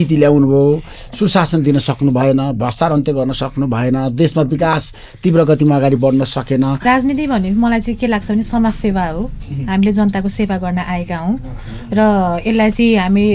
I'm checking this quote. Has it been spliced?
yes; 1 cut; at 6.8 s

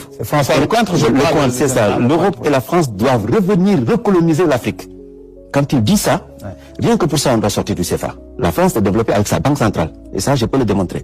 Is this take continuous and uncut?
no; 1 cut; at 8.2 s

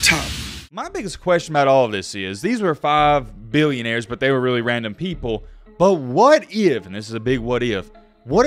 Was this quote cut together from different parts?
yes; 1 cut; at 0.9 s

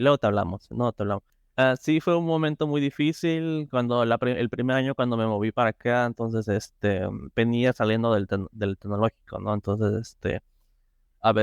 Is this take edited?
yes; 1 cut; at 1.3 s

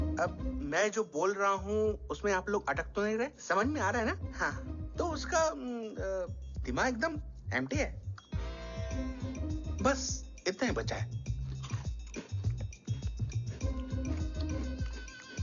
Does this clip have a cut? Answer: no; 0 cuts

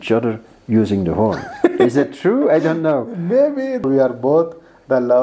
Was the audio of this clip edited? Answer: yes; 1 cut; at 3.8 s

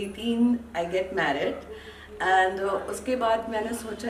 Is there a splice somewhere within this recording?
no; 0 cuts

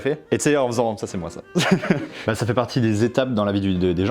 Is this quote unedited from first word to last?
no; 1 cut; at 2.2 s

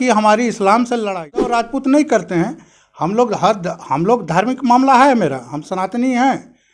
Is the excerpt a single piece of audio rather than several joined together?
no; 1 cut; at 1.6 s

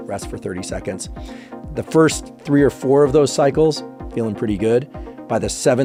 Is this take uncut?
yes; 0 cuts

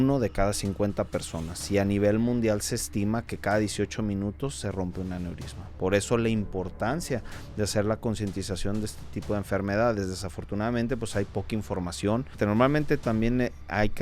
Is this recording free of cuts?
no; 1 cut; at 12.4 s

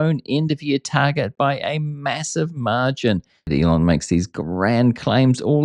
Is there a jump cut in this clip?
yes; 1 cut; at 3.5 s

